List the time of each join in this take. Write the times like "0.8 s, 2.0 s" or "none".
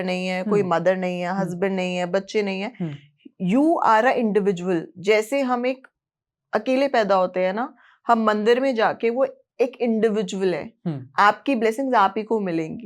none